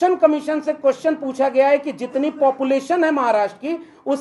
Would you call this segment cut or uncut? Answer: uncut